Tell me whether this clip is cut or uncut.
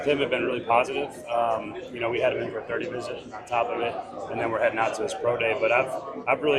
uncut